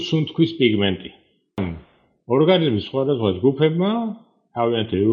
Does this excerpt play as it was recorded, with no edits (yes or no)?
no